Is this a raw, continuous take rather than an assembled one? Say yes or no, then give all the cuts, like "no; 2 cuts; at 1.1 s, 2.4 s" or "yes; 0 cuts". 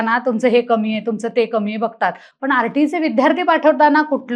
yes; 0 cuts